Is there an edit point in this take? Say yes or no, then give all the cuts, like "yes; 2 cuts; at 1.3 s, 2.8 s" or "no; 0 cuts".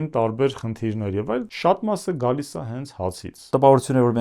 yes; 2 cuts; at 1.5 s, 3.4 s